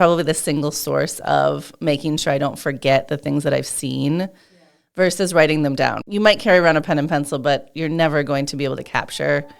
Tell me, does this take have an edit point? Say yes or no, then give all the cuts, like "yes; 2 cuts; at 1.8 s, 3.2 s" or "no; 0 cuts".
yes; 1 cut; at 6.0 s